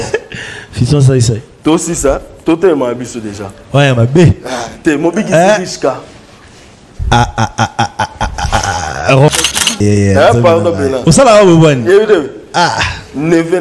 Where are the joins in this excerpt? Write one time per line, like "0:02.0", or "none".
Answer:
0:09.8